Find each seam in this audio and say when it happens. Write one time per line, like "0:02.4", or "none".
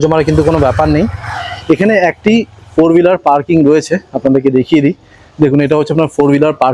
none